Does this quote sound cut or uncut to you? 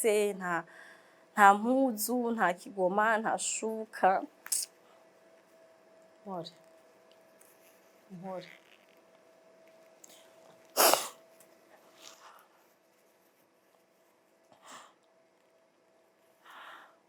uncut